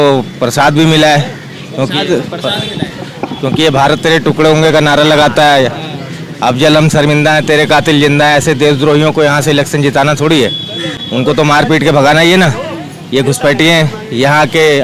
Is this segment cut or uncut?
uncut